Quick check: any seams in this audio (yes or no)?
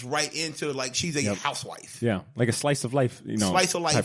no